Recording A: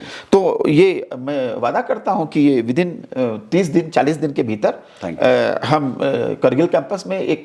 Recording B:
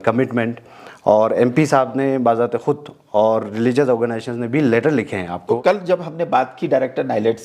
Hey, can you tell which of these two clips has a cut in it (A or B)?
B